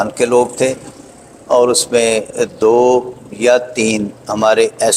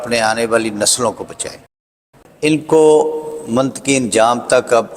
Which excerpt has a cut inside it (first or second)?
second